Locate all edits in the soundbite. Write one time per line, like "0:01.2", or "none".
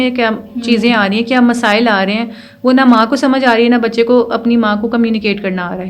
none